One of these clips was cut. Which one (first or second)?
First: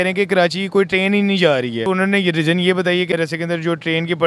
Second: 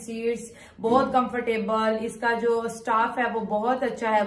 first